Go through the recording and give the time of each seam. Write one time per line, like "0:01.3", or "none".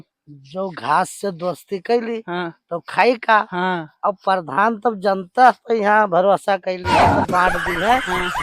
none

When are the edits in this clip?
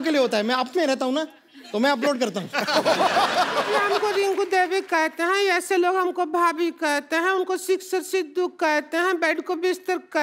0:03.9

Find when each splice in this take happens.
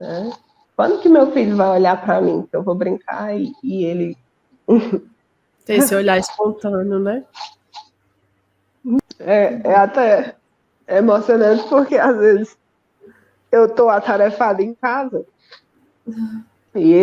0:09.0

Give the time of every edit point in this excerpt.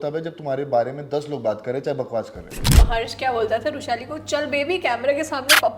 0:02.8

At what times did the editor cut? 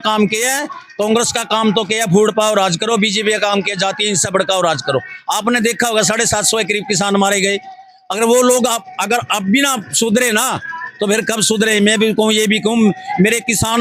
none

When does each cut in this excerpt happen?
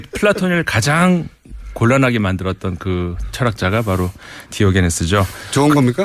0:04.9

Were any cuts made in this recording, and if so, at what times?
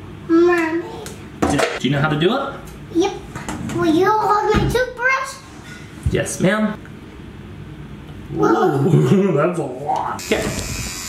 0:10.2

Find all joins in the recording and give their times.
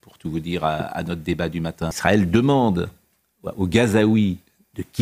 0:02.0

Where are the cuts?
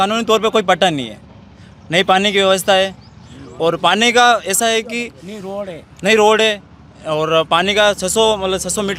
none

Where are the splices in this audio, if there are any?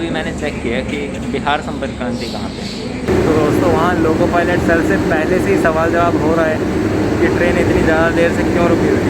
0:01.2
0:03.1

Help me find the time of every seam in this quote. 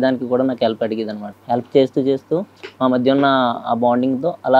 0:01.2

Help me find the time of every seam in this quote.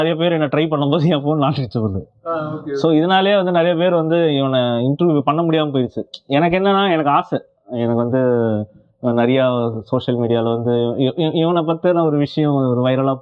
none

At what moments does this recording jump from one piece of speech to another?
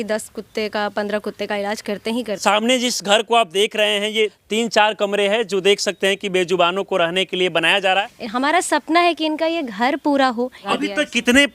0:02.4
0:04.4
0:08.2
0:10.7

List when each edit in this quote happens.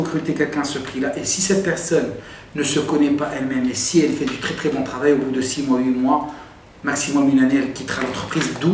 none

